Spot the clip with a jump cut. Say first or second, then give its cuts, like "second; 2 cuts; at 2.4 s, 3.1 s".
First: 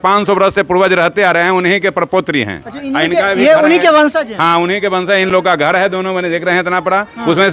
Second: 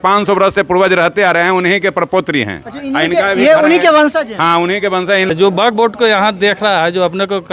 second; 1 cut; at 5.3 s